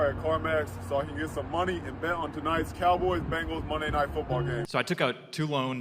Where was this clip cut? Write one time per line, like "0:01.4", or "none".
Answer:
0:04.7